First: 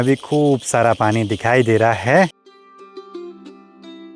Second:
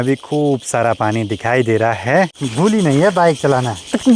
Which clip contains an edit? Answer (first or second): second